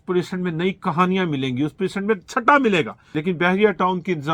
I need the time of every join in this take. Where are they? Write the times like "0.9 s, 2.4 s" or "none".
3.0 s